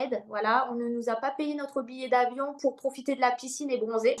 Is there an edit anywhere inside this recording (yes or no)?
no